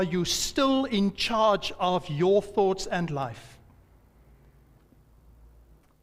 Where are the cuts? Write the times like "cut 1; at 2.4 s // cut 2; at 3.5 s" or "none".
none